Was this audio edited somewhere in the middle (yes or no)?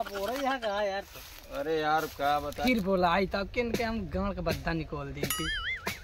yes